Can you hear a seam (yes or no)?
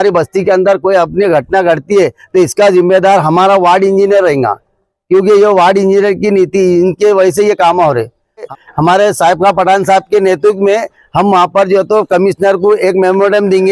yes